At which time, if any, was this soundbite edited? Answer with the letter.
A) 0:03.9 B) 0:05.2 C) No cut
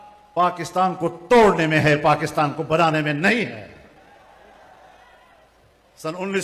C